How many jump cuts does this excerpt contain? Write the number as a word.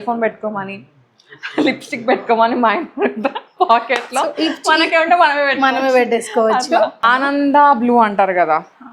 one